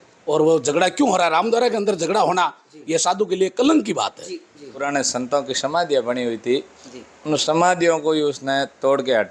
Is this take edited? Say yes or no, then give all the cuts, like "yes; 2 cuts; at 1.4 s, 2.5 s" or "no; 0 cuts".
yes; 1 cut; at 4.9 s